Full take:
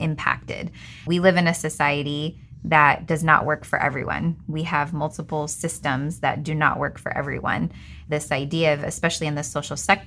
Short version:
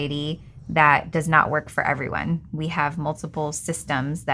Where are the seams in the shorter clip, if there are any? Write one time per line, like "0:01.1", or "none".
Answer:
none